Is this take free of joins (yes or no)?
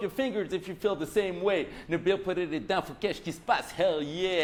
yes